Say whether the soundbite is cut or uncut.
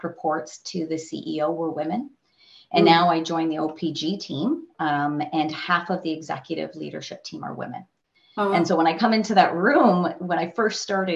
uncut